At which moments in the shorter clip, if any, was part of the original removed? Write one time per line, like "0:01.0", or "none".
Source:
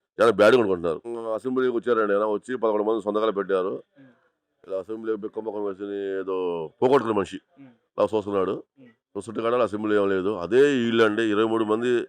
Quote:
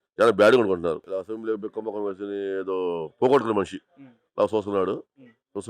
0:01.0